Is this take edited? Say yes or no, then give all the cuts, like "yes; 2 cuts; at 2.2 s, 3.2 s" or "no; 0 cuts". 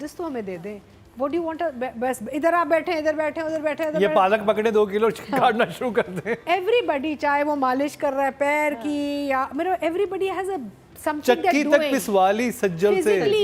no; 0 cuts